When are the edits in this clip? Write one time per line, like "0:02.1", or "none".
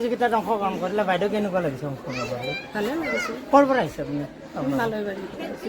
none